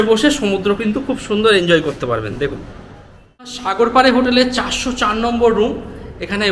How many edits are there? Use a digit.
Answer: 1